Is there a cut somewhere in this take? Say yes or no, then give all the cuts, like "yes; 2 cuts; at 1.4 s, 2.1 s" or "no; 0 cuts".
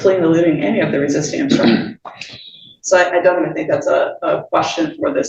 no; 0 cuts